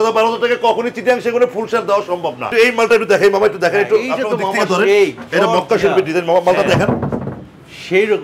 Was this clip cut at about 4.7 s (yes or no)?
no